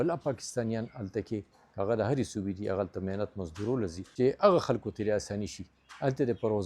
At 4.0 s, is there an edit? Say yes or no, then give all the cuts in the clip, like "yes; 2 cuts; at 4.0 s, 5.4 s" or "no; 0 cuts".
yes; 1 cut; at 4.0 s